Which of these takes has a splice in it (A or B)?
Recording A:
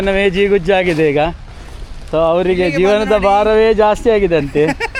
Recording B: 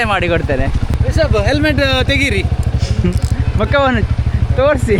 B